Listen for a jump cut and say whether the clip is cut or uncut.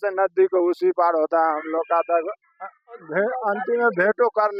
uncut